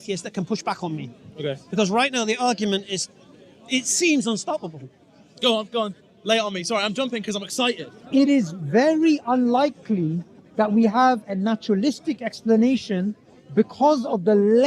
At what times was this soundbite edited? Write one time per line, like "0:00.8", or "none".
0:07.9